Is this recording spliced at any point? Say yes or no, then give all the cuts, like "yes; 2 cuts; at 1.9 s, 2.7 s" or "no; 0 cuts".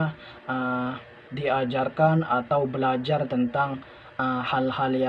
no; 0 cuts